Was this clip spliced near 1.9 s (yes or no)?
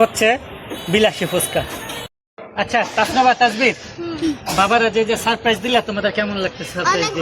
yes